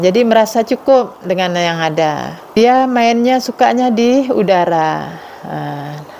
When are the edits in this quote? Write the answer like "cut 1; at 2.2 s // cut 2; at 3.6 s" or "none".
cut 1; at 2.5 s